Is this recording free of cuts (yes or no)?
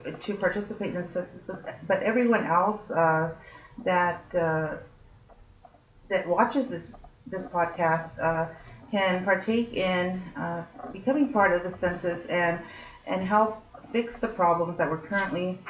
yes